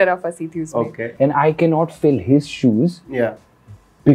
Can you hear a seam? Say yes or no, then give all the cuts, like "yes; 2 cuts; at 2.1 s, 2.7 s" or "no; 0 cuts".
yes; 1 cut; at 1.0 s